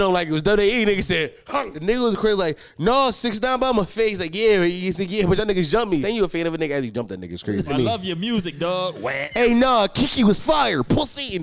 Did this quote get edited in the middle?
yes; 4 cuts; at 1.7 s, 6.0 s, 7.7 s, 9.2 s

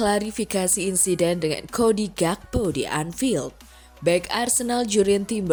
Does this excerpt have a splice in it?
no; 0 cuts

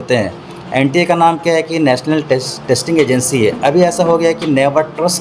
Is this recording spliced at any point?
no; 0 cuts

